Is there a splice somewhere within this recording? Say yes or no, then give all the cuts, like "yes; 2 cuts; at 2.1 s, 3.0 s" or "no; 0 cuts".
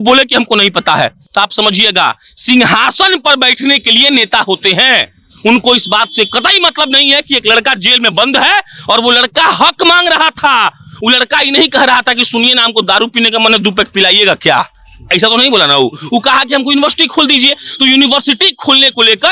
no; 0 cuts